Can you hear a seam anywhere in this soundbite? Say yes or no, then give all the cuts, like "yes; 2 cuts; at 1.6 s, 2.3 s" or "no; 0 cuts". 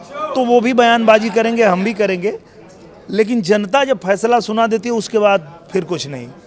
no; 0 cuts